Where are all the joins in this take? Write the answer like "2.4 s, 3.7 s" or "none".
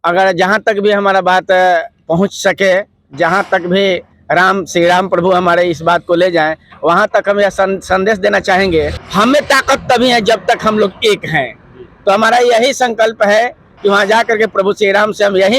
9.0 s